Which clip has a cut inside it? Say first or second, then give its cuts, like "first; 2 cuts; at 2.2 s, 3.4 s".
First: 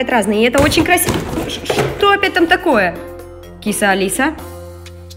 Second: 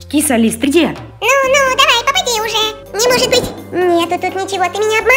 second; 3 cuts; at 1.1 s, 2.8 s, 3.6 s